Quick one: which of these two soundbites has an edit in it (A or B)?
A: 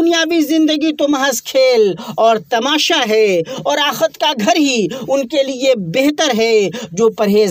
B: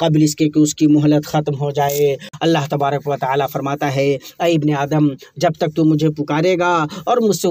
B